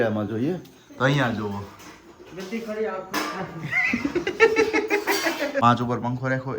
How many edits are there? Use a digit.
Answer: 1